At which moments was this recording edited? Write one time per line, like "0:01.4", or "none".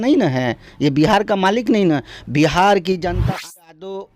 0:03.1